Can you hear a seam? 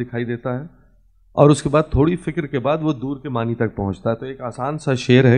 no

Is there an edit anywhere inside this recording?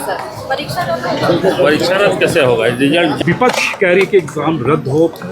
yes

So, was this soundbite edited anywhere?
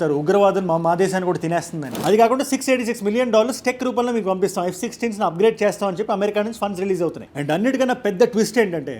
yes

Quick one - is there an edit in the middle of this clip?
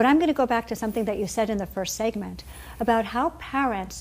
yes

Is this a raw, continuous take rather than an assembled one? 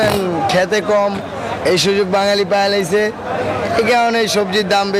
yes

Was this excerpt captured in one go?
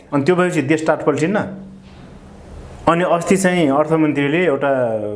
yes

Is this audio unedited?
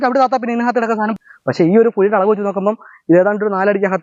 no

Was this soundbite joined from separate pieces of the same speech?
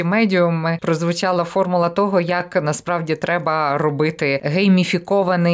yes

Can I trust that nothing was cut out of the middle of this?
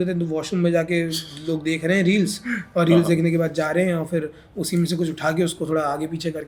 yes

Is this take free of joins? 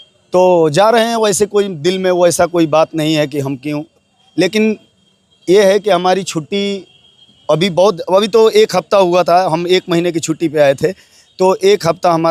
yes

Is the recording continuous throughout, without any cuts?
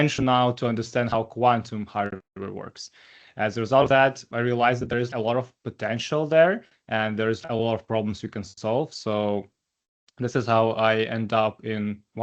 no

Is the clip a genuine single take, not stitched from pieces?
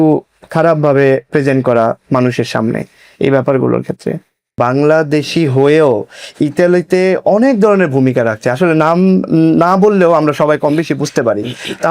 no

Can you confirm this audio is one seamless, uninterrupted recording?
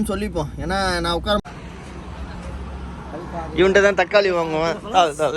no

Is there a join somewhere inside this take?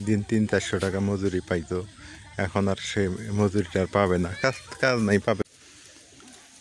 yes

